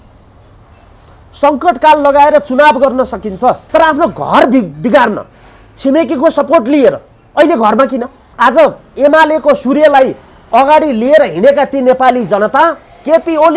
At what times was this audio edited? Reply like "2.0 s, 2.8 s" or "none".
3.6 s, 8.2 s